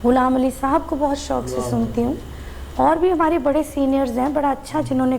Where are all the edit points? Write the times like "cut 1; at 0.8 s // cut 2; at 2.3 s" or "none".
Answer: none